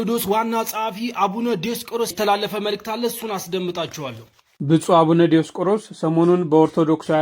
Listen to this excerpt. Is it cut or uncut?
cut